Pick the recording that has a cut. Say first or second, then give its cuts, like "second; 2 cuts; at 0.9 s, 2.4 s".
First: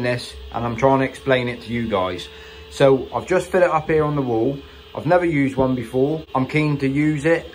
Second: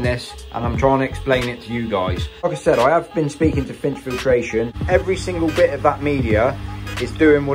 second; 2 cuts; at 2.4 s, 4.8 s